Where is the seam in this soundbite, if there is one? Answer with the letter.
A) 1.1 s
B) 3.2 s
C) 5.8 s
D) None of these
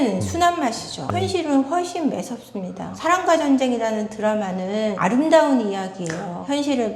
A